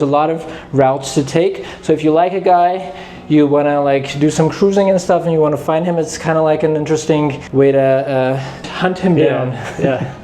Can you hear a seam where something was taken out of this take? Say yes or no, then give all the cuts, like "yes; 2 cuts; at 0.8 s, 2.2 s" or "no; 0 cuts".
yes; 2 cuts; at 7.4 s, 8.7 s